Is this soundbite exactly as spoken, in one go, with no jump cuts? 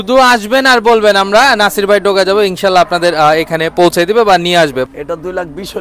no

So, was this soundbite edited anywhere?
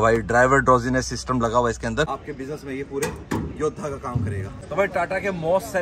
yes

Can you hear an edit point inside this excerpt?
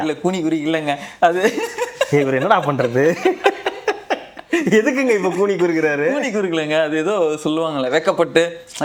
no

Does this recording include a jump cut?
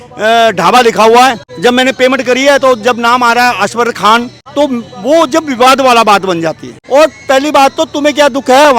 yes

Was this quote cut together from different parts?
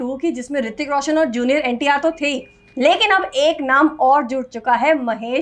no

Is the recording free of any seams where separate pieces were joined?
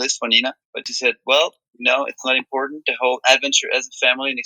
yes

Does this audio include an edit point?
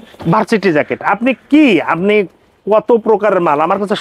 no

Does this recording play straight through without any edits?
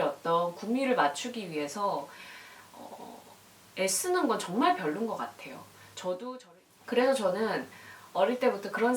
no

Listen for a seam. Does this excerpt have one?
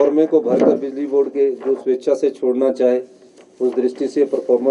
no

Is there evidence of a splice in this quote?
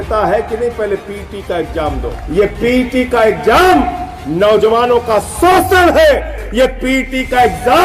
yes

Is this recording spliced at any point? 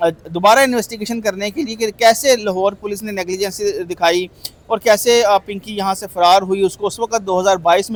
no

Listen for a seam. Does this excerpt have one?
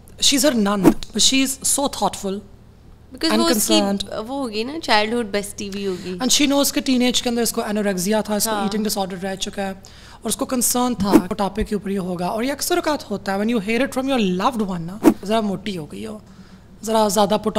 yes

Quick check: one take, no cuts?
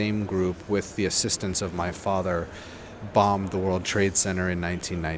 yes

